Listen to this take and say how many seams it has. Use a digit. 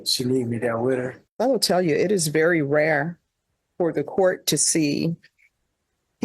1